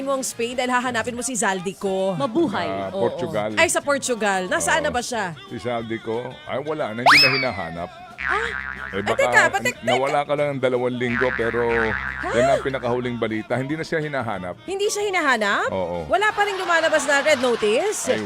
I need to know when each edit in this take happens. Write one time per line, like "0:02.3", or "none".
none